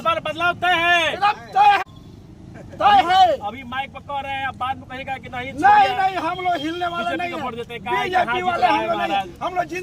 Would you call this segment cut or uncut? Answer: cut